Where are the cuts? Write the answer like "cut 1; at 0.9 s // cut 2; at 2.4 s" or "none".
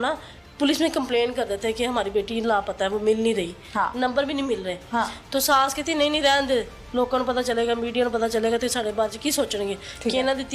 none

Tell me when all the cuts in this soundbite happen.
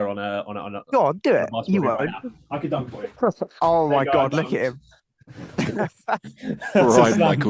none

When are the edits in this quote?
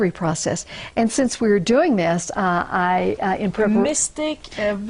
cut 1; at 2.1 s

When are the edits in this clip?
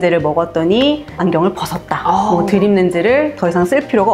cut 1; at 1.2 s

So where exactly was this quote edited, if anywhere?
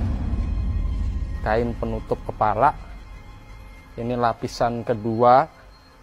cut 1; at 1.1 s

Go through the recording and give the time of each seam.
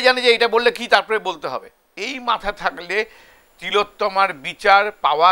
cut 1; at 1.8 s

